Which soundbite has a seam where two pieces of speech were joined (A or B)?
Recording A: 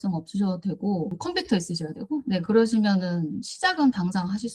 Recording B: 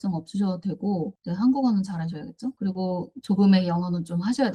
A